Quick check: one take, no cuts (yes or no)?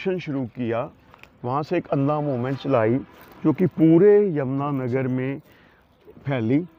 yes